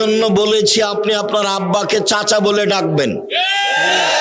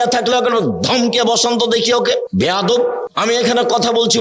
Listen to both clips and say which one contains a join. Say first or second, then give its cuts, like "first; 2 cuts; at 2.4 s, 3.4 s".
second; 2 cuts; at 2.3 s, 3.1 s